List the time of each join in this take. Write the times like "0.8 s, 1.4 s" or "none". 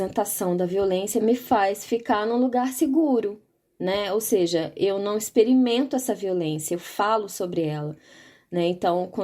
1.2 s